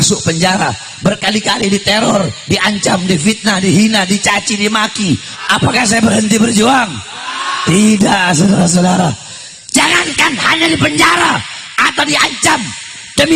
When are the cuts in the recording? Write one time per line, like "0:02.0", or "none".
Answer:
0:05.3
0:09.3